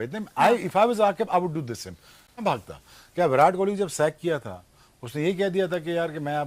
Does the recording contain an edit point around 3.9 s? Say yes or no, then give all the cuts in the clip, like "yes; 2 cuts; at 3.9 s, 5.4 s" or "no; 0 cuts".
no; 1 cut; at 2.4 s